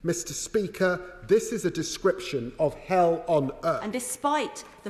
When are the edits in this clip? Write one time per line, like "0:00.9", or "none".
0:03.8